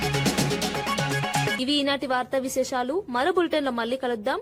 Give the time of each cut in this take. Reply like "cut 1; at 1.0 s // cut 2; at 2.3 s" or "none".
none